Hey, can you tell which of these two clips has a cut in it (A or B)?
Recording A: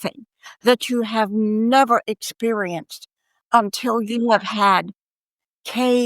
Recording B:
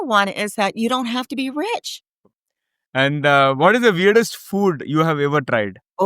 B